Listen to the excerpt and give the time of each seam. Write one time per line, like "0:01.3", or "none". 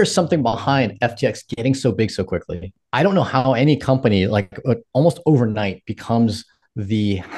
0:02.8